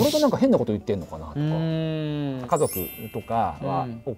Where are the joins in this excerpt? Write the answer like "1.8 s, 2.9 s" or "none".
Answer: 2.4 s